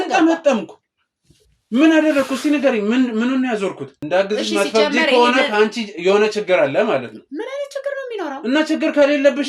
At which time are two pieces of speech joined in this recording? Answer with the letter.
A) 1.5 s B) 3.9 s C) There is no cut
B